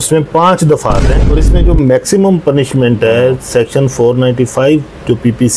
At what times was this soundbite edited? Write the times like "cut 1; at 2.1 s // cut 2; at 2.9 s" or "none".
cut 1; at 1.2 s